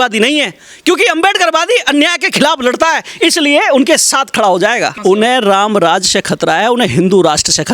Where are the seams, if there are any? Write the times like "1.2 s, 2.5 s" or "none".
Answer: 5.0 s

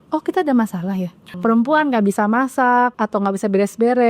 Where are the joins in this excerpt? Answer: 1.2 s, 3.0 s

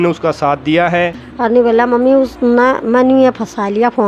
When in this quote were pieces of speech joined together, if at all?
1.2 s

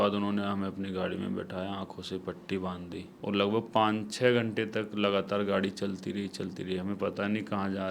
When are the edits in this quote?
3.1 s

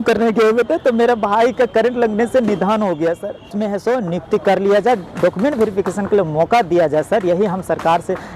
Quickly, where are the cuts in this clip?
3.5 s

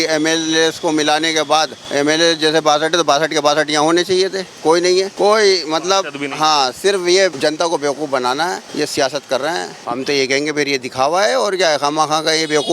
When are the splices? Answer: 1.8 s, 5.1 s, 7.4 s, 8.6 s, 9.8 s

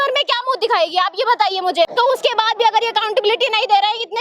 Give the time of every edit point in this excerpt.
1.9 s

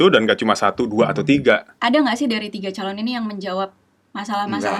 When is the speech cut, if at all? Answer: 1.7 s

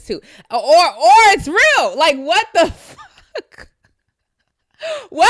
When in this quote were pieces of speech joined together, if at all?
none

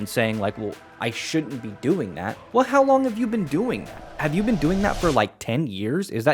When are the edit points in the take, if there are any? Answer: 2.3 s

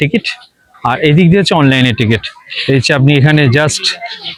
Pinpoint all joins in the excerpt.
none

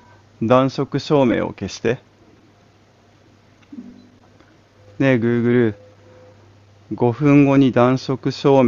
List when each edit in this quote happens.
4.8 s

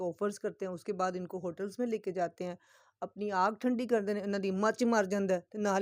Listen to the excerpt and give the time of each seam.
none

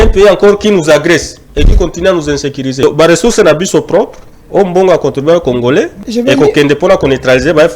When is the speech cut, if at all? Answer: 2.8 s, 6.0 s

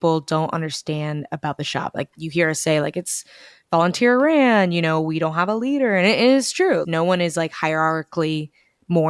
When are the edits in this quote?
2.1 s, 6.9 s

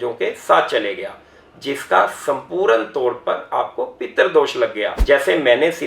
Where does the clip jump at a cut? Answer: 4.9 s

